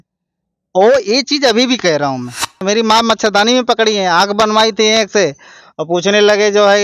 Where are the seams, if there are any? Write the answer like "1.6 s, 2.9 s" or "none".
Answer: 2.6 s

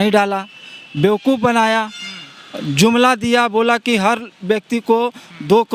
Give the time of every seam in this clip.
none

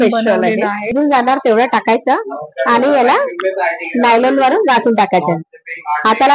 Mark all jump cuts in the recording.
0.9 s

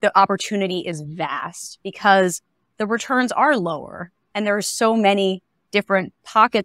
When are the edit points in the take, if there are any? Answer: none

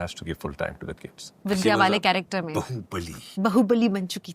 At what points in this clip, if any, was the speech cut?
1.3 s

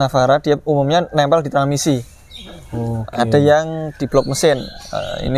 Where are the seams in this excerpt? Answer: none

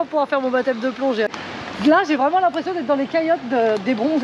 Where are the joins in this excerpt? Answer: 1.3 s

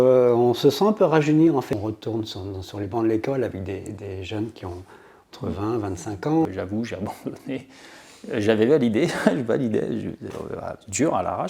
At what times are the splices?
1.7 s, 6.5 s

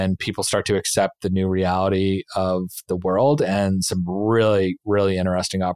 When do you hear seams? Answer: none

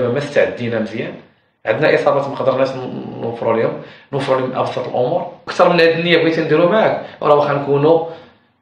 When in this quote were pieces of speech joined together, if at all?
5.4 s

